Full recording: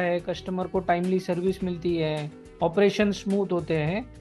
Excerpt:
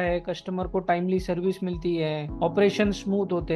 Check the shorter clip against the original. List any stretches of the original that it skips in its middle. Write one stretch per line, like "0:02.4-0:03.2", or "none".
0:02.3-0:02.5